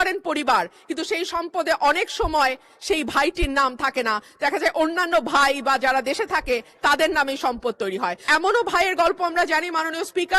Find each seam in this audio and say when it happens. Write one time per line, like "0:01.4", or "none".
0:08.2